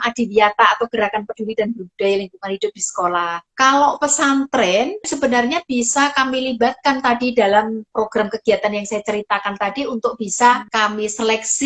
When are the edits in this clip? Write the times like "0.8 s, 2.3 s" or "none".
3.4 s, 5.1 s, 7.9 s, 10.7 s